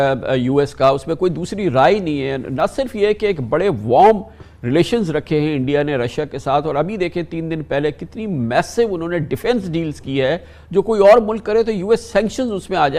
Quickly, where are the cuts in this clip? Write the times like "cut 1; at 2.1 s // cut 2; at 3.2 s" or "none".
none